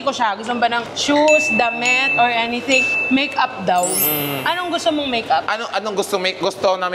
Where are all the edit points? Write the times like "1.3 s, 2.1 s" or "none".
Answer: none